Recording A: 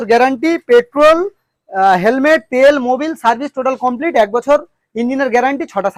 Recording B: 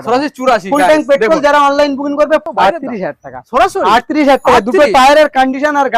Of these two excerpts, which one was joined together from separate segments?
B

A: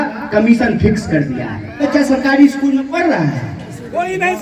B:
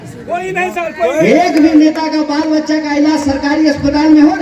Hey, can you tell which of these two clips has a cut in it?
A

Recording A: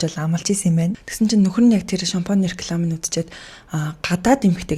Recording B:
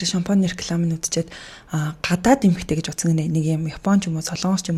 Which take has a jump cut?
A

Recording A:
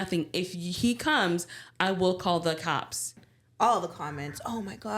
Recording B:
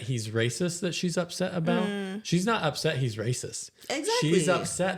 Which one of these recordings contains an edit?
A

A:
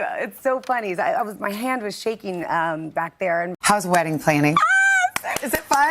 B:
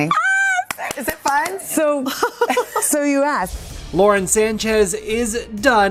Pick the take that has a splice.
A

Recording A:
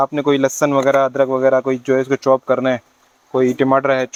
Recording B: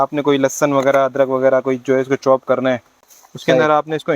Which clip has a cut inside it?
B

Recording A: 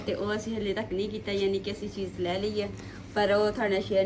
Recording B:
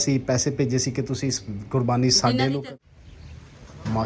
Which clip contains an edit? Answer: B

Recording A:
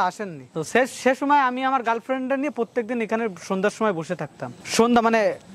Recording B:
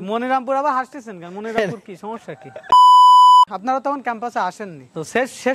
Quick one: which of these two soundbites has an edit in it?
B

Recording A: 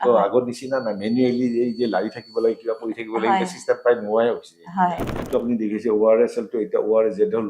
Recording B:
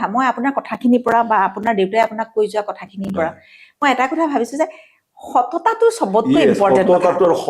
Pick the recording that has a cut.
A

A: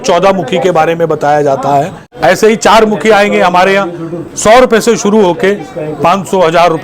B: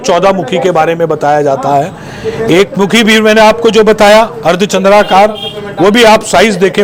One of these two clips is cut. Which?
A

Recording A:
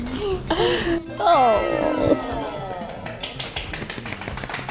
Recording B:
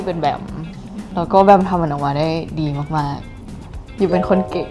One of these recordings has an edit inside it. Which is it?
B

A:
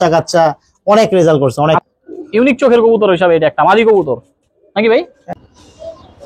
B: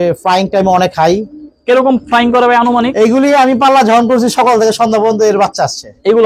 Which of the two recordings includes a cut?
A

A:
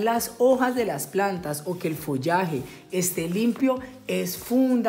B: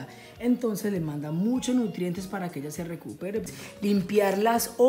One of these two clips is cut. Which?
B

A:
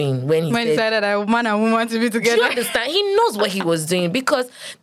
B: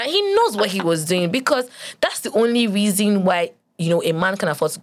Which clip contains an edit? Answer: B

